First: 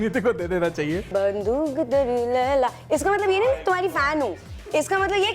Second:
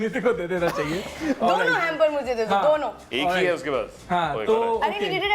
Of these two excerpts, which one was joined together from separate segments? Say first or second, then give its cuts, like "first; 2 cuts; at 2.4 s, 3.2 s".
first; 1 cut; at 1.1 s